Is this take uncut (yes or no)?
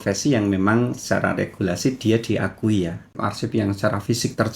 no